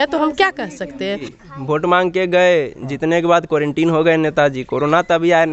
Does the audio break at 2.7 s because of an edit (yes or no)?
no